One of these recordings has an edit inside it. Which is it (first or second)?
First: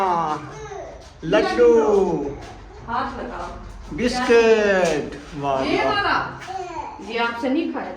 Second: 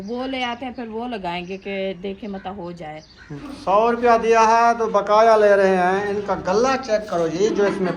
second